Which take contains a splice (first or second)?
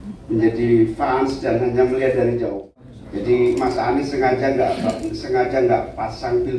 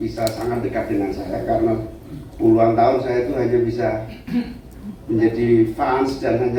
first